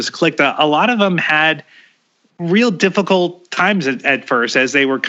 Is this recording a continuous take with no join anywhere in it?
yes; 0 cuts

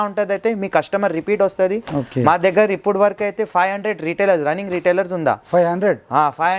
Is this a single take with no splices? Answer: yes; 0 cuts

